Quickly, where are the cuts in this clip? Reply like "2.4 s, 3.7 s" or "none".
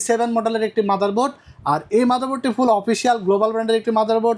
none